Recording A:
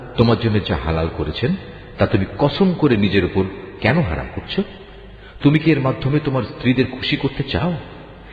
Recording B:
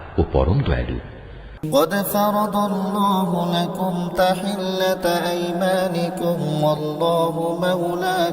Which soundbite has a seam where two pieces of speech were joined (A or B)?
B